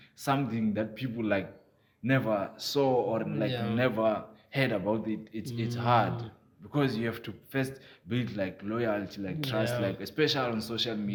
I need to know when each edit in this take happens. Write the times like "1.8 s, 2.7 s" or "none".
none